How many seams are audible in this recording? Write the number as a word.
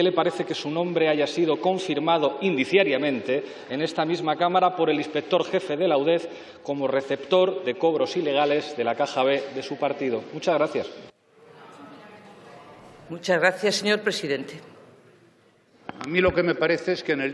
zero